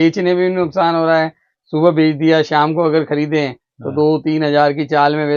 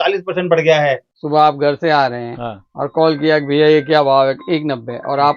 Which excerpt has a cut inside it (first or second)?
second